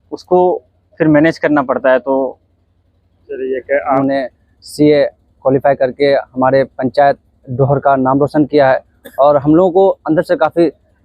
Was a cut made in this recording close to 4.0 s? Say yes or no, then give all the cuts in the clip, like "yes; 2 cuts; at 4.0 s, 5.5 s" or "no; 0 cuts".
yes; 1 cut; at 4.0 s